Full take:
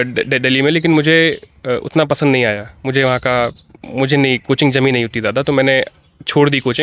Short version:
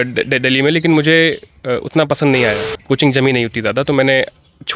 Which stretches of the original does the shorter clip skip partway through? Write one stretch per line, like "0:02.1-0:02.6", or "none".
0:02.8-0:04.4